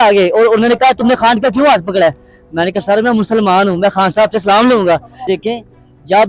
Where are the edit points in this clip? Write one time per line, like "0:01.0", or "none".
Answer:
0:05.3